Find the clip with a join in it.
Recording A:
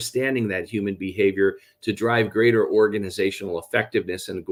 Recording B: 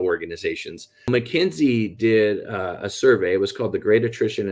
B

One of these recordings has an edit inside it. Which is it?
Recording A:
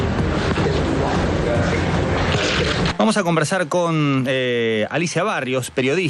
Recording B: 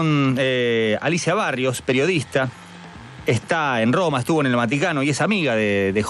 A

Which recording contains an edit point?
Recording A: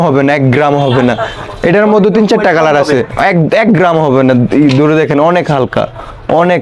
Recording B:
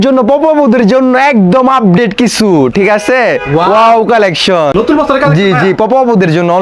B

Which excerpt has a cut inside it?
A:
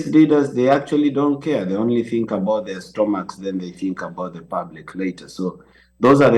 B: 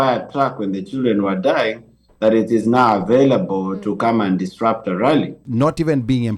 B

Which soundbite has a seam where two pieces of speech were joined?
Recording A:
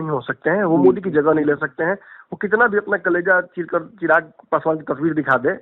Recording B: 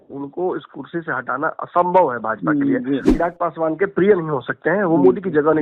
B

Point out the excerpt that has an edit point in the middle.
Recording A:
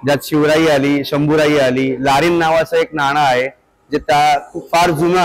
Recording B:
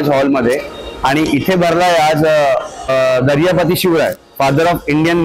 B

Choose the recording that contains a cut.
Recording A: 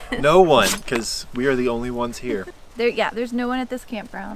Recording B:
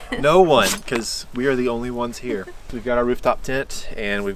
B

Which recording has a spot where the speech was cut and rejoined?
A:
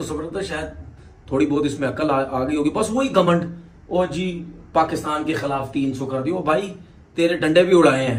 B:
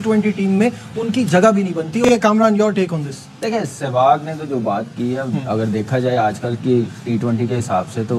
B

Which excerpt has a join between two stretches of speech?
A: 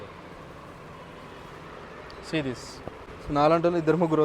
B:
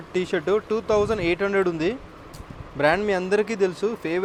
A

